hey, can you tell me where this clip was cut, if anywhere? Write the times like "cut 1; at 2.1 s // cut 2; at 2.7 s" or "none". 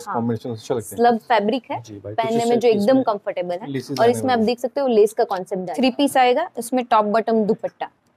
cut 1; at 5.7 s